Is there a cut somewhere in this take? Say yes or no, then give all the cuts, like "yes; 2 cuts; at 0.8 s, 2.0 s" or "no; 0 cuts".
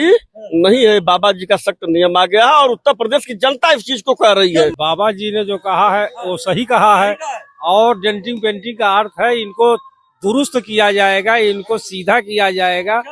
yes; 1 cut; at 4.7 s